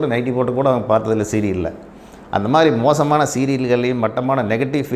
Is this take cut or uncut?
uncut